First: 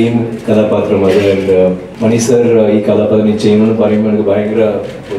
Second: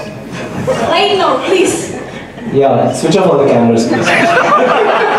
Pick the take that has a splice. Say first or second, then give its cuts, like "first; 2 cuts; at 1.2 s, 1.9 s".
first; 1 cut; at 1.9 s